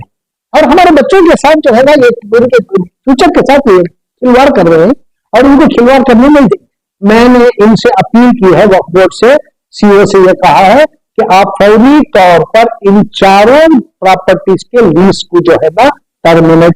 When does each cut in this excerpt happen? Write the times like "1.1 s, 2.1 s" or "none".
6.9 s